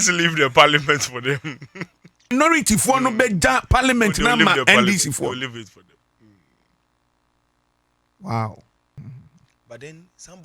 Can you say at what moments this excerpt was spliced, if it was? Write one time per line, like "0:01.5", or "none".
0:02.3
0:09.0